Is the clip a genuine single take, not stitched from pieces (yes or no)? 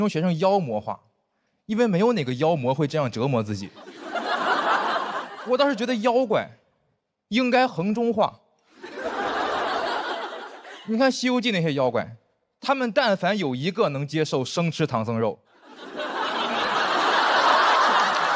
yes